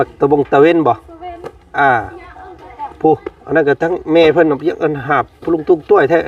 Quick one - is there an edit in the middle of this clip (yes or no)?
no